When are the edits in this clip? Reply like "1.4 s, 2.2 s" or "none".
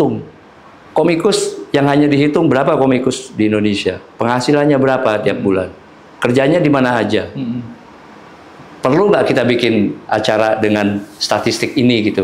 none